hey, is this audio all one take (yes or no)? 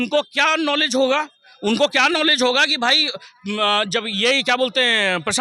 yes